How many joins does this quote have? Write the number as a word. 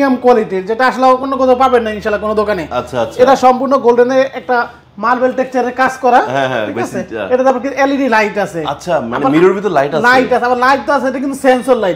zero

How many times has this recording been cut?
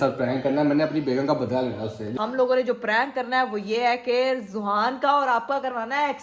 one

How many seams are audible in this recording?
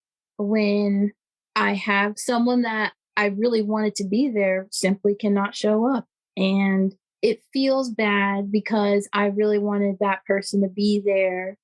two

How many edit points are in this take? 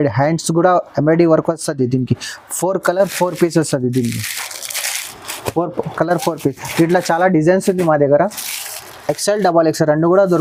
zero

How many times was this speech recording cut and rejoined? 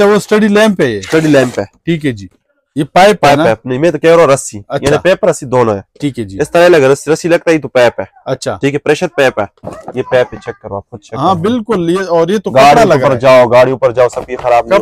two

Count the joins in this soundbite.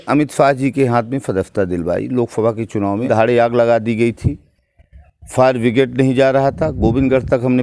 one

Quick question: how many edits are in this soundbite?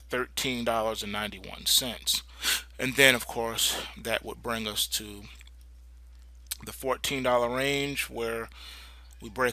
zero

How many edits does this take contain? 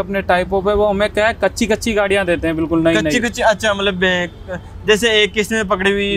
zero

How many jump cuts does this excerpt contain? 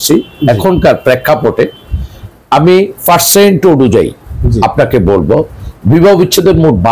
zero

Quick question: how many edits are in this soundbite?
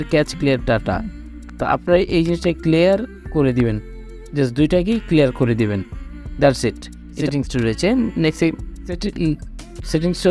two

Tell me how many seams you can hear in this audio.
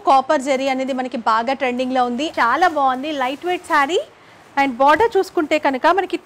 one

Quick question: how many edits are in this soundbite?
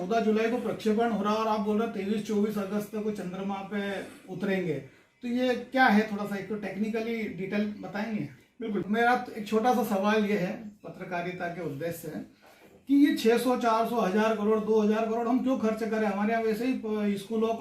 one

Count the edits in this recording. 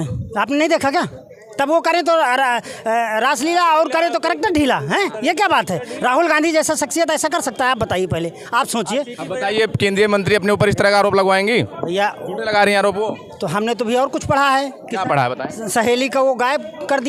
zero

